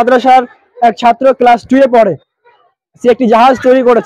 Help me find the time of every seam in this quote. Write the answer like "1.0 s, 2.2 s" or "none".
none

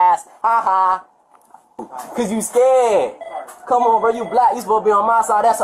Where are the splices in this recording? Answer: 2.0 s

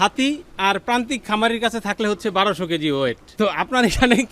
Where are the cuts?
3.2 s

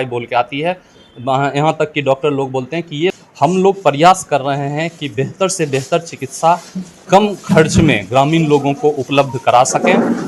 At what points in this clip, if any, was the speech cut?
3.1 s

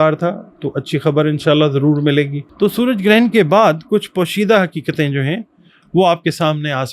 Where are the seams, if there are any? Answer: 2.4 s

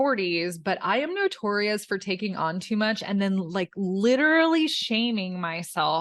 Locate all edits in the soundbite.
none

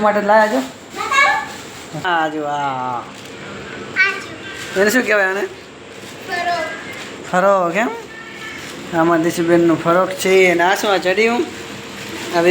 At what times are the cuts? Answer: 2.0 s

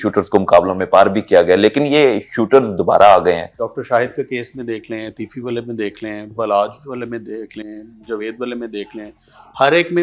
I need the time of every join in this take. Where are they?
3.6 s

